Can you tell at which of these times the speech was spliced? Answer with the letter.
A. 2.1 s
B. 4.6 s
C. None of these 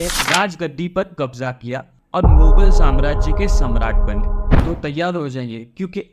B